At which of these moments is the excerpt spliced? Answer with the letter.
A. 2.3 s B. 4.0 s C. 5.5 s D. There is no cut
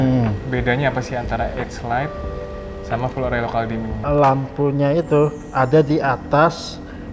B